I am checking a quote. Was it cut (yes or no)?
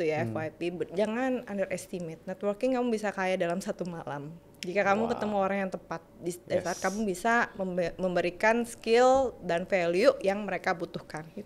no